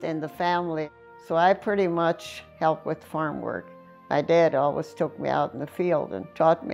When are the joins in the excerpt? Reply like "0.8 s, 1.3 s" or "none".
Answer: 0.9 s, 2.4 s